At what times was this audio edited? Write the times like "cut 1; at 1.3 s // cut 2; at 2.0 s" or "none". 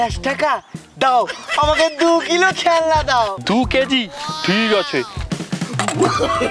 none